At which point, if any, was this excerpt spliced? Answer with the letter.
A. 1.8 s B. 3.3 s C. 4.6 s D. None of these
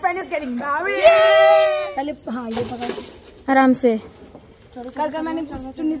A